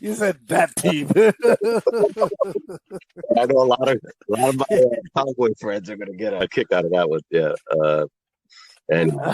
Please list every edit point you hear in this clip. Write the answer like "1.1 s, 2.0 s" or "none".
6.4 s